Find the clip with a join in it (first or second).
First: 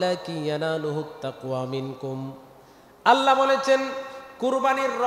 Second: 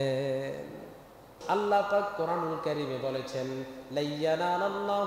second